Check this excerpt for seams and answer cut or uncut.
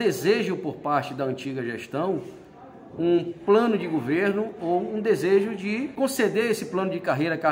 cut